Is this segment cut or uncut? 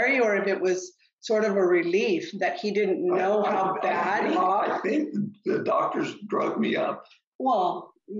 uncut